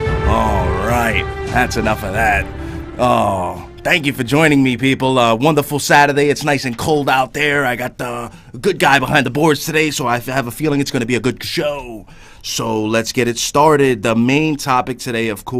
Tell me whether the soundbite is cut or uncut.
cut